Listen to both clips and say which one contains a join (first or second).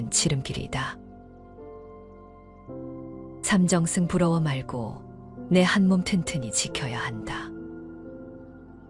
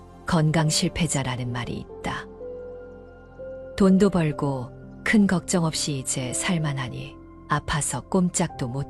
second